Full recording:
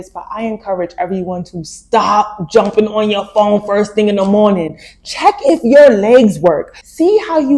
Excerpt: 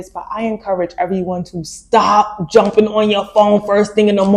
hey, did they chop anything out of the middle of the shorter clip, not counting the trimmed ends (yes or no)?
no